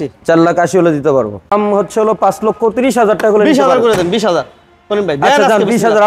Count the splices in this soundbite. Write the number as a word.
one